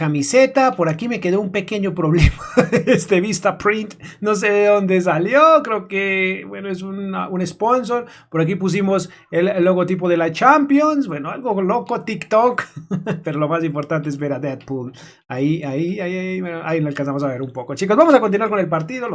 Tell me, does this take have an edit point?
no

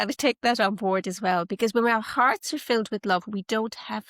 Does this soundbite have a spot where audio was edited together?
no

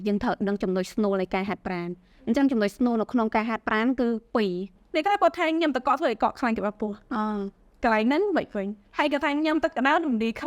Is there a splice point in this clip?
yes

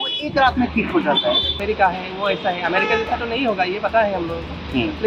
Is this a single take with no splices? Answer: no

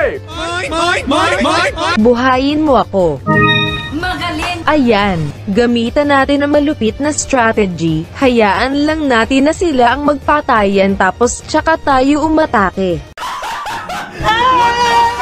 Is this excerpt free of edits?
no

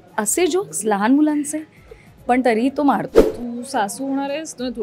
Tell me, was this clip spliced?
yes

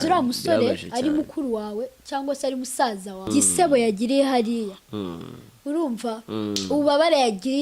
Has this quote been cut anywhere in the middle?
yes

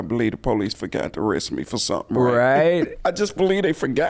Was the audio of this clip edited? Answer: yes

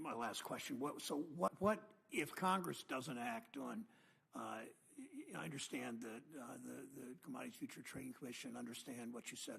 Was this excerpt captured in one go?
no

